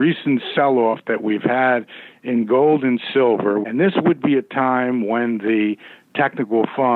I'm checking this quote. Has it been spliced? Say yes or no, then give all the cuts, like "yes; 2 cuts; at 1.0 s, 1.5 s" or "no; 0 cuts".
yes; 1 cut; at 3.6 s